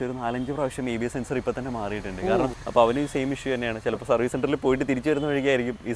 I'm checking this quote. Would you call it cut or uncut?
cut